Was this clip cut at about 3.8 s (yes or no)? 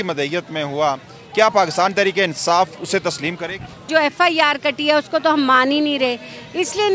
yes